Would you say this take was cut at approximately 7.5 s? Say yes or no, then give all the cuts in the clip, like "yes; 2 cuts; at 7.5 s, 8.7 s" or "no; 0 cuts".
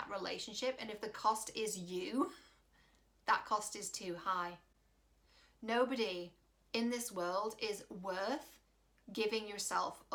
no; 0 cuts